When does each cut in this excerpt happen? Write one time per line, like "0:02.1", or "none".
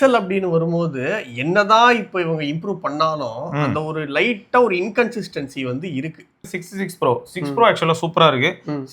0:06.6